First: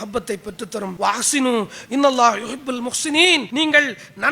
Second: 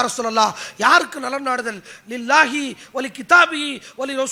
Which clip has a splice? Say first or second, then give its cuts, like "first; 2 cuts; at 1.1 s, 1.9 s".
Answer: first; 2 cuts; at 0.9 s, 3.5 s